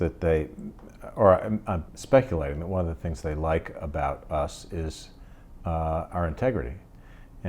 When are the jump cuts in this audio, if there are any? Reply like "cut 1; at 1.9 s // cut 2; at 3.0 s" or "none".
cut 1; at 1.9 s